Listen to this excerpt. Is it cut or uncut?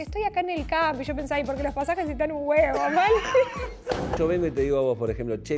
cut